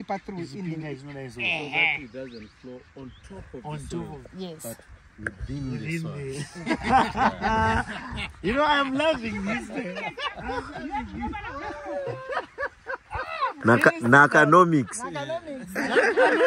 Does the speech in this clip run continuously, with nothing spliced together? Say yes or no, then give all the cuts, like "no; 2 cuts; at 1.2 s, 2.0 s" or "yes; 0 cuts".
yes; 0 cuts